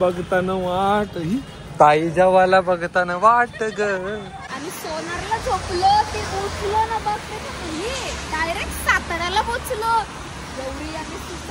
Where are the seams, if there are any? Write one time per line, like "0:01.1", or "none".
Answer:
0:04.4